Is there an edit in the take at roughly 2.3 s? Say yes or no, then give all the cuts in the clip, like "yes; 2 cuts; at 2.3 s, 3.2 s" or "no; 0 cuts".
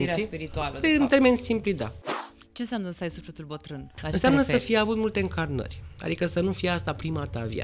yes; 1 cut; at 2.3 s